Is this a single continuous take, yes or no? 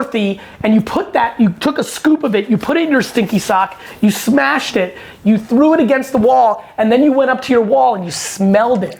yes